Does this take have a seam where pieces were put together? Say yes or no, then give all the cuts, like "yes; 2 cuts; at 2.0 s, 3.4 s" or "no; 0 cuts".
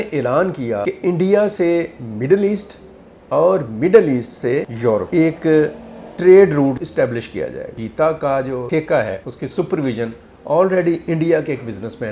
yes; 6 cuts; at 0.9 s, 5.1 s, 6.8 s, 7.8 s, 8.7 s, 9.3 s